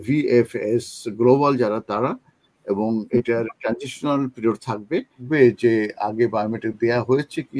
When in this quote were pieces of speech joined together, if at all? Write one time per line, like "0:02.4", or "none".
0:05.2